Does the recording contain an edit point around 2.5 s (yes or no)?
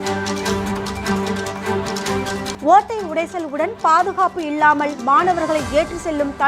yes